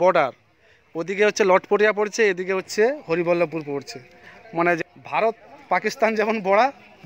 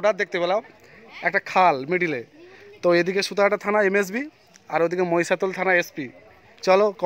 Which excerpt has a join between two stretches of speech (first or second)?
first